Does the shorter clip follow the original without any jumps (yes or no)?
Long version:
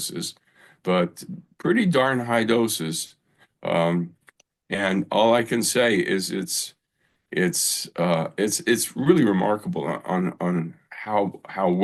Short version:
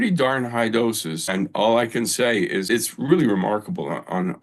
no